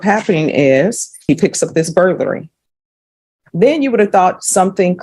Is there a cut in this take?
yes; 1 cut; at 1.3 s

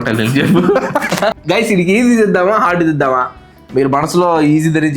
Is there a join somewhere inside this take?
yes; 1 cut; at 1.4 s

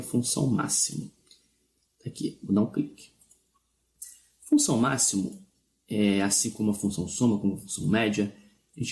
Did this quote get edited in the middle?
yes; 1 cut; at 2.6 s

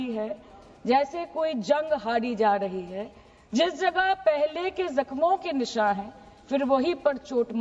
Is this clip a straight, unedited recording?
yes; 0 cuts

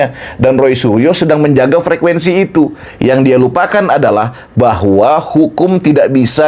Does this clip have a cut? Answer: no; 0 cuts

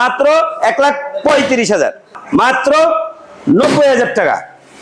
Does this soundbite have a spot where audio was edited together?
yes; 1 cut; at 2.1 s

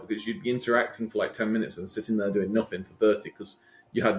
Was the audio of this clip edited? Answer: no; 0 cuts

